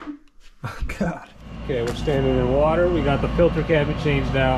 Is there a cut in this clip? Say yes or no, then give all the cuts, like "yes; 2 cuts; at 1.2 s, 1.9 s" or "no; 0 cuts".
yes; 1 cut; at 1.6 s